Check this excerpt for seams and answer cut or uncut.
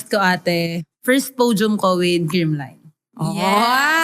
cut